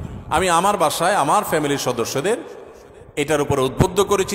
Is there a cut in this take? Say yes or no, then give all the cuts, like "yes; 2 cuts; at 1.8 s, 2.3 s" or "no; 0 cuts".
no; 0 cuts